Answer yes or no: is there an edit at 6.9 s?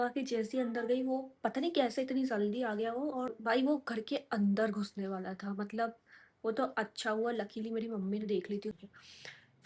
no